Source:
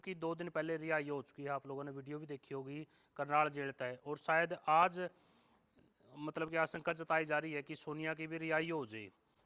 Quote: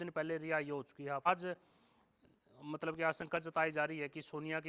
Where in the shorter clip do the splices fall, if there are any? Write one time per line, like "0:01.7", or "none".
0:01.3